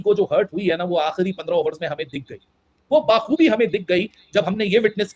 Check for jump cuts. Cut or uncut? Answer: uncut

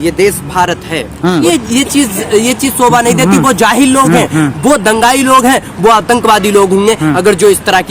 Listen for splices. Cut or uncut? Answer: cut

